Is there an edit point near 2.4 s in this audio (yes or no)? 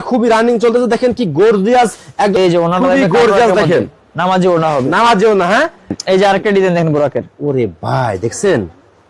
yes